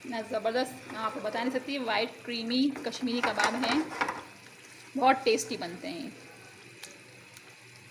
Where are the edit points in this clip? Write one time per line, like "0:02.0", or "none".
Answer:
none

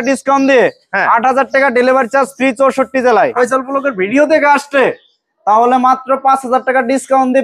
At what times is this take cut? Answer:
0:03.3

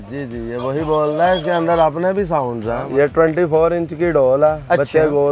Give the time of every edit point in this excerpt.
0:02.8

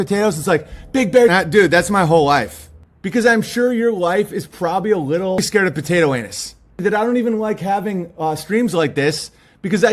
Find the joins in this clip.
0:01.3

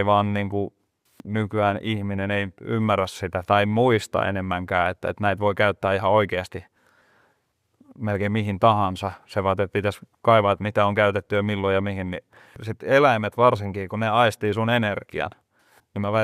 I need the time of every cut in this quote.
0:12.5

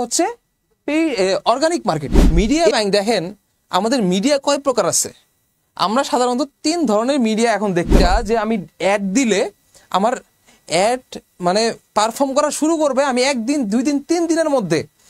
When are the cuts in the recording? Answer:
0:02.4
0:08.2

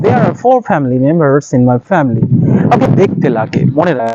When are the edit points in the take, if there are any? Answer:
0:02.9

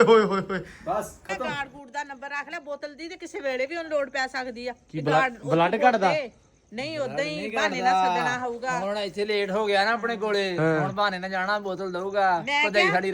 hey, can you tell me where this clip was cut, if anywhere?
0:01.4

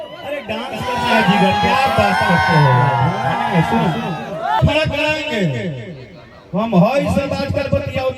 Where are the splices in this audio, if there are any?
0:04.6

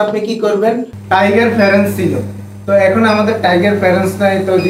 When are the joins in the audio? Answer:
0:00.9

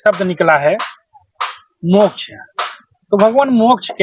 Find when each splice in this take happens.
none

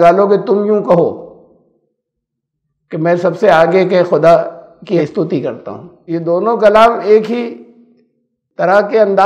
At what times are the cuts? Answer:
0:05.0
0:05.9

